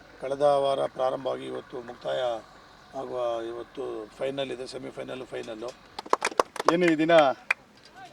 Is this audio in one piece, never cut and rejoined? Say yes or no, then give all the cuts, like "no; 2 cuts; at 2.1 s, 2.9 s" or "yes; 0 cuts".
no; 1 cut; at 5.9 s